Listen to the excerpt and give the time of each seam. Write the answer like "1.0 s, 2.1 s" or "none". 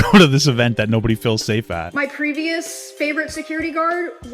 1.9 s